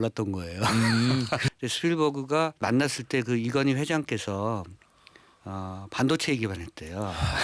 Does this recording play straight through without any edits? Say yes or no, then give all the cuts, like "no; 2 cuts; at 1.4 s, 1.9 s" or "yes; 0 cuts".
no; 2 cuts; at 1.5 s, 2.6 s